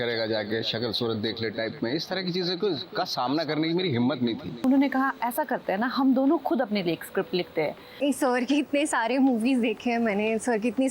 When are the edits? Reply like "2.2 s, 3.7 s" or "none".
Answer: 4.6 s, 8.0 s